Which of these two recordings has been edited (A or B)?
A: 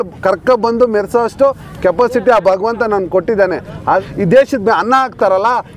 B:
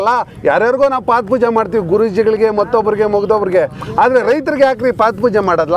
A